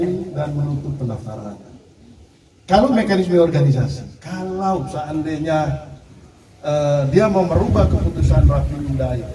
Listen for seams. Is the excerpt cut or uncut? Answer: uncut